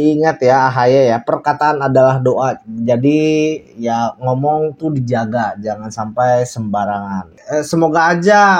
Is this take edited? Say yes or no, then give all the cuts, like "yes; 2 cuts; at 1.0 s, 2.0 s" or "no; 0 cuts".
yes; 1 cut; at 7.4 s